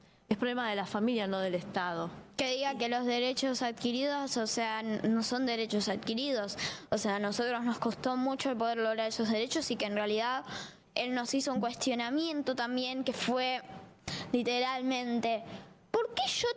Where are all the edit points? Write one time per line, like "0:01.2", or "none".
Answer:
0:15.2